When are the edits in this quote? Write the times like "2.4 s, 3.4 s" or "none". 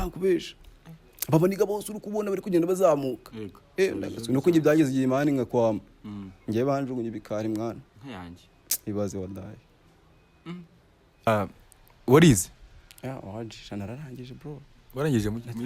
11.3 s